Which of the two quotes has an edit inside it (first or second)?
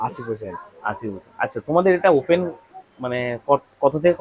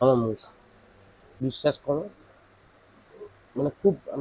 second